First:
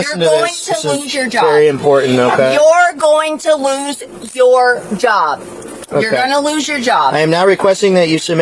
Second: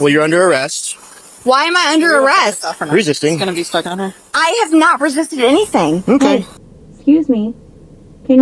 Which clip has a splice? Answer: second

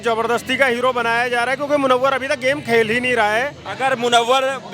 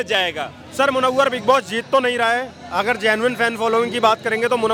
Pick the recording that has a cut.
first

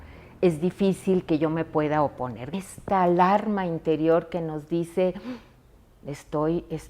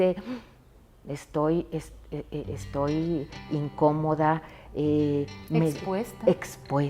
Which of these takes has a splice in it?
first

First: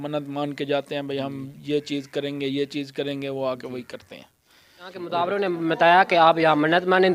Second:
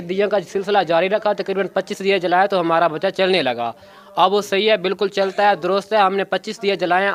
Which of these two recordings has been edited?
first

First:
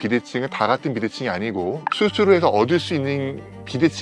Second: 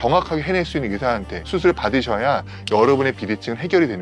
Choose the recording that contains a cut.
first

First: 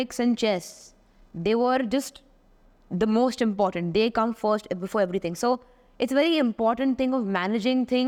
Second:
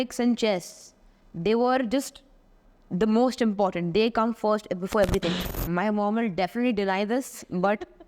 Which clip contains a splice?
second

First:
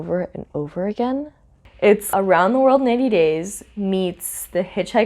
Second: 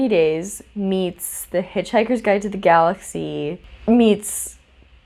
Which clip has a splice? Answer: first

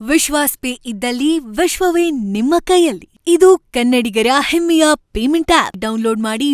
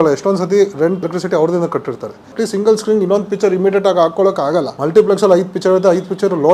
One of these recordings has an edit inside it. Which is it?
second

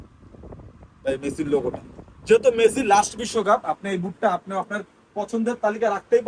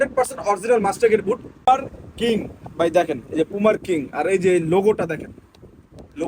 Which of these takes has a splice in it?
second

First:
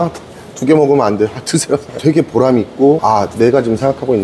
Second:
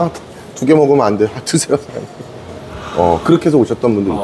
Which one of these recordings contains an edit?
first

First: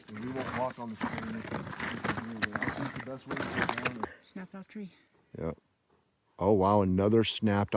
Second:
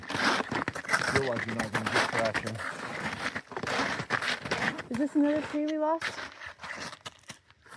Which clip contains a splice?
first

